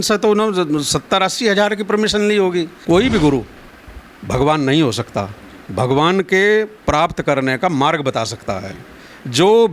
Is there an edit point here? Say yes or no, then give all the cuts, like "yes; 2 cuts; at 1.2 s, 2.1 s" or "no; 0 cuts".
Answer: yes; 1 cut; at 2.8 s